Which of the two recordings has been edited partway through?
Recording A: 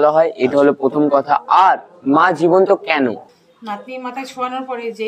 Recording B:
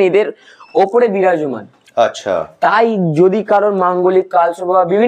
A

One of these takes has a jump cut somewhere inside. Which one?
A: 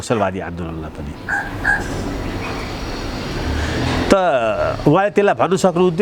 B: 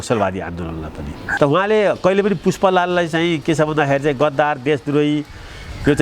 B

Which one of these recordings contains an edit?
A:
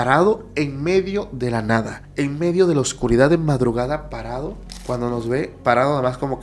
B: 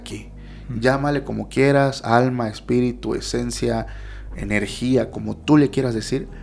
A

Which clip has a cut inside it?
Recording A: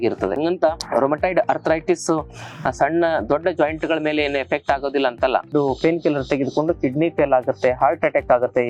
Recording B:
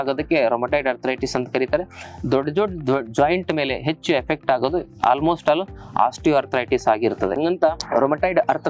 A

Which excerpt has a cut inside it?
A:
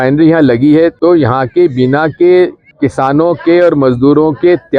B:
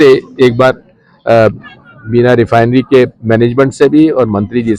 A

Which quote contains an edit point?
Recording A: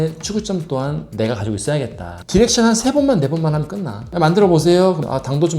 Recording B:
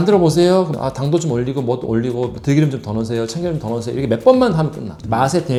A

